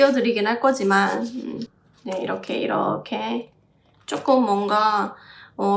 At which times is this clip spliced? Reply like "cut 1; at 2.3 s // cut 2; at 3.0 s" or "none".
none